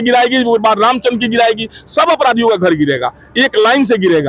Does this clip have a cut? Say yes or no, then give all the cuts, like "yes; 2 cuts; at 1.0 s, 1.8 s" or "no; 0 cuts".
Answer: no; 0 cuts